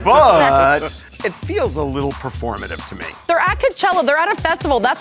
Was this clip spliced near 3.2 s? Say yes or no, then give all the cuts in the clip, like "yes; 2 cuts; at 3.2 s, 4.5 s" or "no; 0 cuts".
yes; 2 cuts; at 1.0 s, 3.2 s